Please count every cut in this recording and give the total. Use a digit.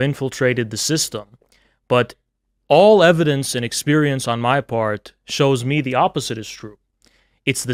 0